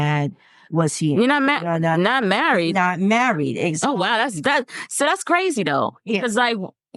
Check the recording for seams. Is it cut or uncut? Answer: uncut